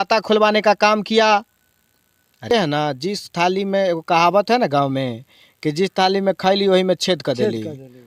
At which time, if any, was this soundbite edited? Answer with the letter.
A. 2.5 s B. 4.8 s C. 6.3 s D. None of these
A